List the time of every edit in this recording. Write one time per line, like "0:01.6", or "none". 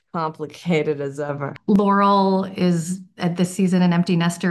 0:01.4